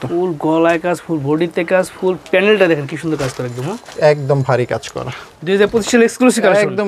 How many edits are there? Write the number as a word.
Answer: one